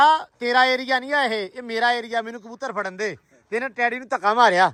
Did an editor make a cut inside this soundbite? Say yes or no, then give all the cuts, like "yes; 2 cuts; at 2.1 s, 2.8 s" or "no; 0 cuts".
no; 0 cuts